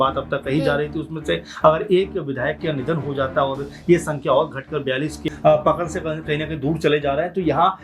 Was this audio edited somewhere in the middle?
yes; 1 cut; at 5.2 s

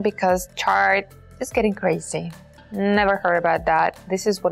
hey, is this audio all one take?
no; 1 cut; at 2.6 s

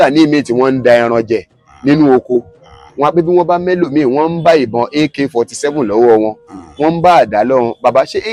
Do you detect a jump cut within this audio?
no; 0 cuts

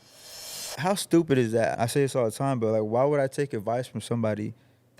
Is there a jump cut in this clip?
yes; 1 cut; at 1.7 s

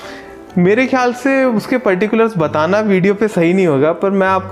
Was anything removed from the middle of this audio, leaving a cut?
no; 0 cuts

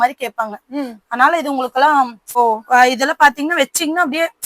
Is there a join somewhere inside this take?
yes; 1 cut; at 2.4 s

